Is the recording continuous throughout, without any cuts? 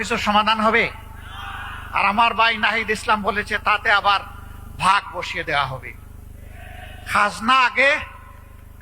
yes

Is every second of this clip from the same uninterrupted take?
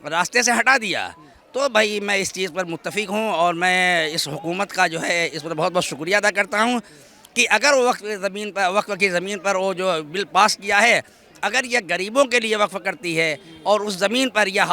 yes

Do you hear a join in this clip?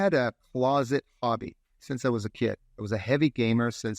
yes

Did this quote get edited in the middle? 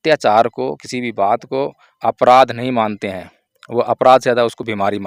no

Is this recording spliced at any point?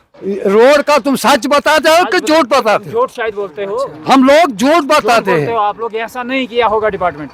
no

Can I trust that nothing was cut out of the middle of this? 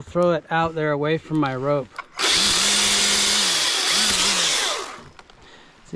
yes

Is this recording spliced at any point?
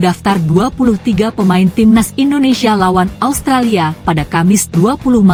no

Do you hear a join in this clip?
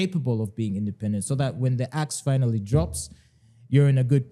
no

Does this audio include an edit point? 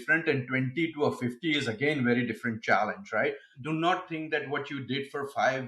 yes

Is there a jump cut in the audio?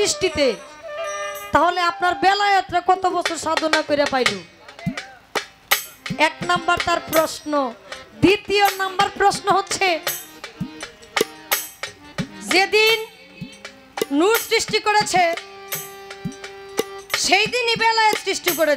no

